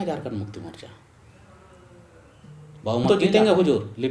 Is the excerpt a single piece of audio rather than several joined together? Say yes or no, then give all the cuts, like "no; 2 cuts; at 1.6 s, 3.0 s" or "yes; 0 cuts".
no; 1 cut; at 3.1 s